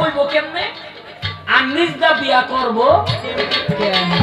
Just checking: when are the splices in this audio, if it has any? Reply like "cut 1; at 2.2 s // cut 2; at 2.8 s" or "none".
none

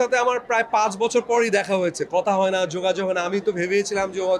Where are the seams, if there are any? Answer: none

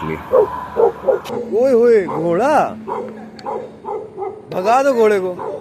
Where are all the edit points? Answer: cut 1; at 1.2 s

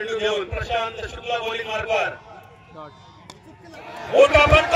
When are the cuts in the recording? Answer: none

